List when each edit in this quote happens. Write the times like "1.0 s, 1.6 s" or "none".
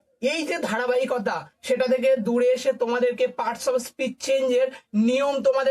none